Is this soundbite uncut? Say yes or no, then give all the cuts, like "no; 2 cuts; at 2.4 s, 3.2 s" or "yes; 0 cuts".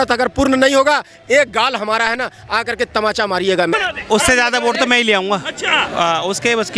no; 1 cut; at 3.7 s